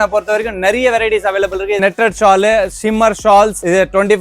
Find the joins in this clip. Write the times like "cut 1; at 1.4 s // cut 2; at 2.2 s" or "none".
cut 1; at 1.8 s